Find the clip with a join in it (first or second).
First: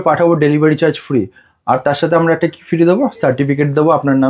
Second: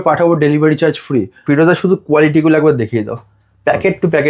second